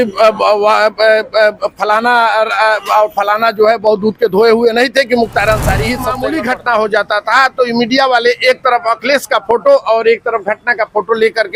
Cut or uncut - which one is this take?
cut